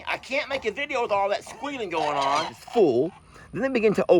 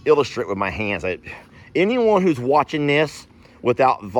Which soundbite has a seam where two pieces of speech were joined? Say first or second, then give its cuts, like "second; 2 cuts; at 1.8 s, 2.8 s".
first; 1 cut; at 2.6 s